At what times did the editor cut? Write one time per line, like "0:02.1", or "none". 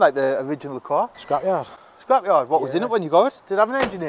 0:01.2